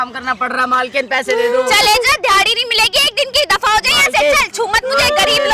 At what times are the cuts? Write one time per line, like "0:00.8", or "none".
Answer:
none